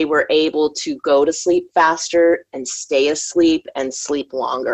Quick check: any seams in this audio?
no; 0 cuts

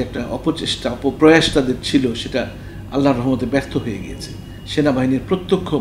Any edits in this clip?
yes; 1 cut; at 1.2 s

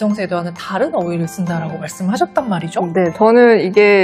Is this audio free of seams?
no; 1 cut; at 3.1 s

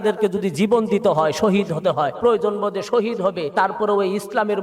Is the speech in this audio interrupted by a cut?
yes; 2 cuts; at 2.1 s, 3.5 s

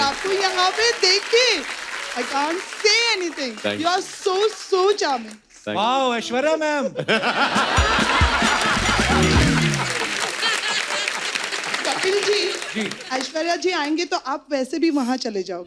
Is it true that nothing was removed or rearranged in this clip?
yes; 0 cuts

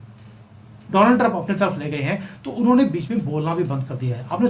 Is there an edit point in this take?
no; 0 cuts

